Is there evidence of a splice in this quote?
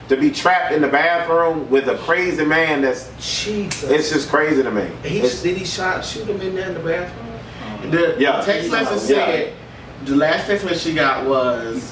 no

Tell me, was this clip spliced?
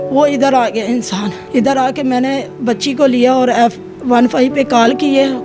yes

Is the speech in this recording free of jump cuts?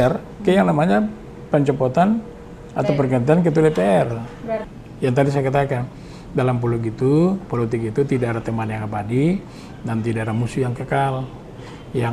no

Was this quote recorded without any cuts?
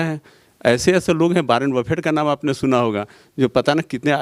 yes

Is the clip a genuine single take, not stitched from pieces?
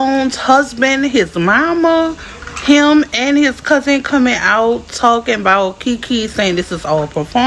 yes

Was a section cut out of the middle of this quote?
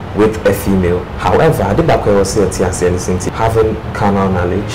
yes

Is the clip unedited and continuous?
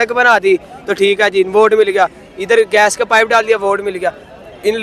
yes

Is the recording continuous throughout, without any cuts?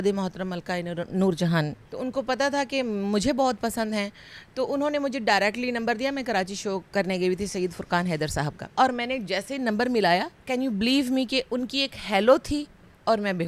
no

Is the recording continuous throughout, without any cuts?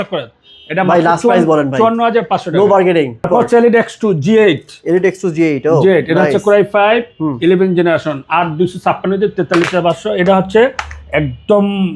no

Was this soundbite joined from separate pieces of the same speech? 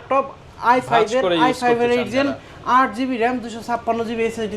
no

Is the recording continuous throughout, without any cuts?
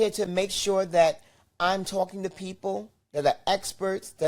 yes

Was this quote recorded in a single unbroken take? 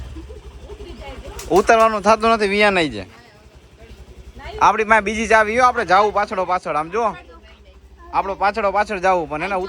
yes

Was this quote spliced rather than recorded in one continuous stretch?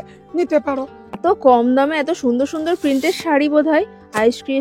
yes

